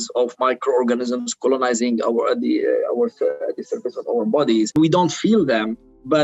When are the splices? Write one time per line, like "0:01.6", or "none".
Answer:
0:04.7

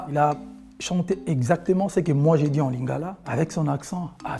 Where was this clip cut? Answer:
none

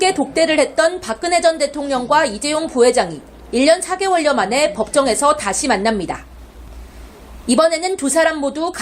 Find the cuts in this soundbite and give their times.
none

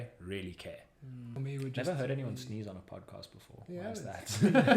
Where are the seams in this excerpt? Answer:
0:01.3

